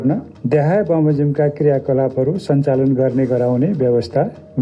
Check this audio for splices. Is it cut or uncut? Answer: uncut